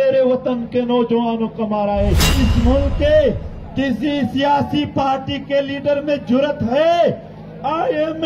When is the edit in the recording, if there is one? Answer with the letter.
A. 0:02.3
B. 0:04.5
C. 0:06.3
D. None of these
A